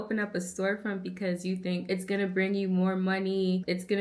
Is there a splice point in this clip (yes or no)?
yes